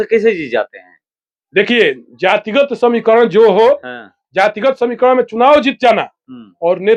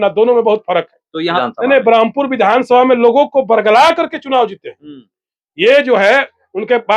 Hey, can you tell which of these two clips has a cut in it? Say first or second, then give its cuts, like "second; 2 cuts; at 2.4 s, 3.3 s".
second; 1 cut; at 1.4 s